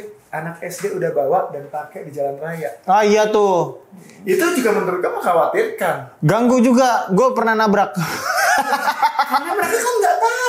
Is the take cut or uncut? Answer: uncut